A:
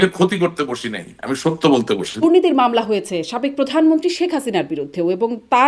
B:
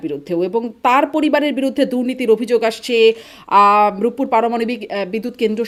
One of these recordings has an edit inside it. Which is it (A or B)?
A